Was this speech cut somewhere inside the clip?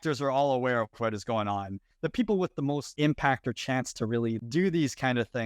yes; 3 cuts; at 1.9 s, 2.9 s, 4.4 s

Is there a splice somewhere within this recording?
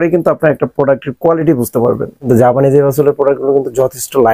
yes; 1 cut; at 2.3 s

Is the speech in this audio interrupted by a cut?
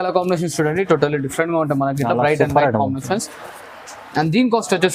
no; 0 cuts

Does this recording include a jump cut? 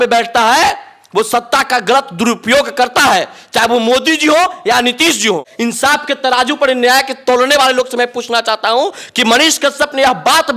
yes; 1 cut; at 5.5 s

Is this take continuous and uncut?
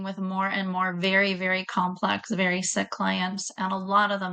yes; 0 cuts

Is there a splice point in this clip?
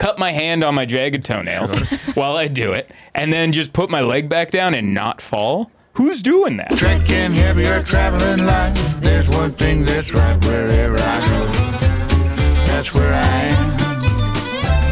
yes; 1 cut; at 6.7 s

